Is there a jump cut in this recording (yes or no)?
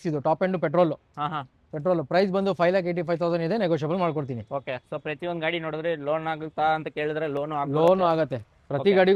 no